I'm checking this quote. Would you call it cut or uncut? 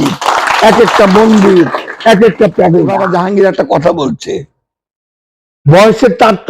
cut